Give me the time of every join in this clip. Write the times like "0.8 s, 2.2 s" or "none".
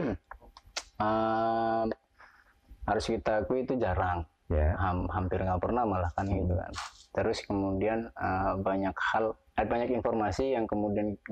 none